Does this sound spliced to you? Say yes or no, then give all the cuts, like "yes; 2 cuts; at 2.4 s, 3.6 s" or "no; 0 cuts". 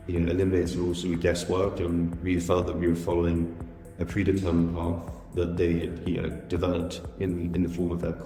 no; 0 cuts